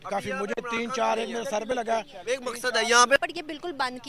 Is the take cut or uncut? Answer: cut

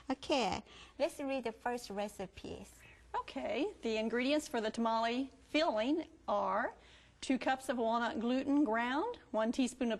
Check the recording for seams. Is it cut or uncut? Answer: uncut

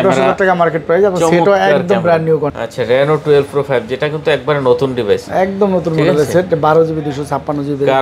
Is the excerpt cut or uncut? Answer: cut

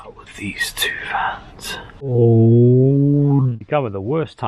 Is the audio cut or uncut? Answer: cut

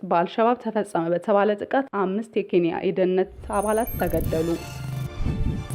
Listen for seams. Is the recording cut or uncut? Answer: cut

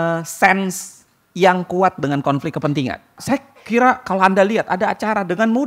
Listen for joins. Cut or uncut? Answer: cut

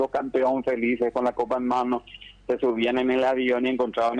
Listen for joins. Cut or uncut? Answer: uncut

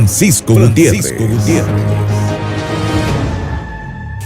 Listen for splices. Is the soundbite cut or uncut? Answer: cut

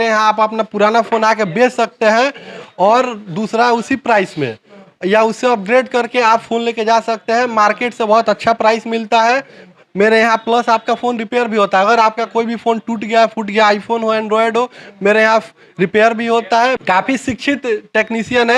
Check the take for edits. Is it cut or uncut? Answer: uncut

